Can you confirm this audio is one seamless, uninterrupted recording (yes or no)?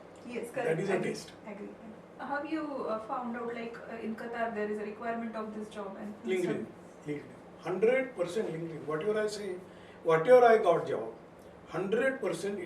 no